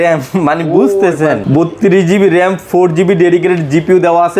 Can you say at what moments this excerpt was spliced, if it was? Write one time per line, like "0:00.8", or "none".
none

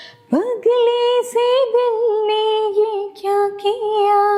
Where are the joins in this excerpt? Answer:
none

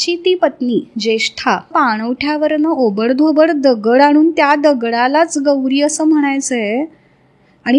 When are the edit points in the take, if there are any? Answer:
0:01.7

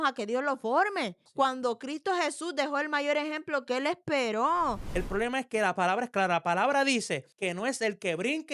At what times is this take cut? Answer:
0:04.8

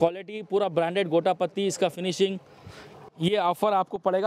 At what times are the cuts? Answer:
none

